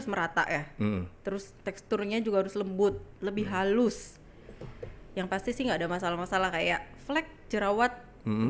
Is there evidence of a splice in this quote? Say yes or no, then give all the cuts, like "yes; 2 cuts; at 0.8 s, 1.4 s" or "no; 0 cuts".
no; 0 cuts